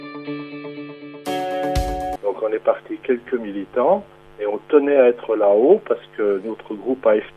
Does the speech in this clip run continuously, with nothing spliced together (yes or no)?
no